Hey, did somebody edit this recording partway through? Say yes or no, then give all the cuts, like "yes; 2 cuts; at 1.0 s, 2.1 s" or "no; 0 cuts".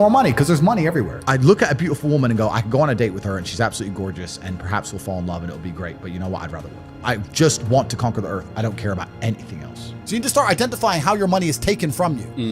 yes; 3 cuts; at 1.2 s, 7.0 s, 9.9 s